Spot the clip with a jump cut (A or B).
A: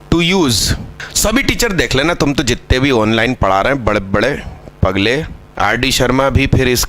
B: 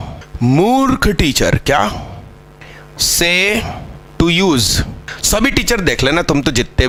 A